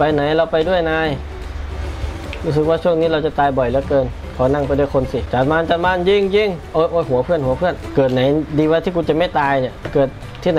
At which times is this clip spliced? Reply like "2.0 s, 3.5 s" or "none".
5.3 s, 7.8 s